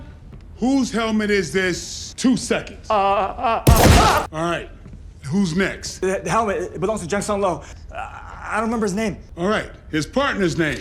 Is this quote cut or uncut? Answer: cut